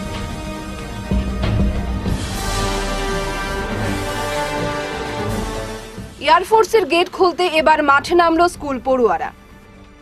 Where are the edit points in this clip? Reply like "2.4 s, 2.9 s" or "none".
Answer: none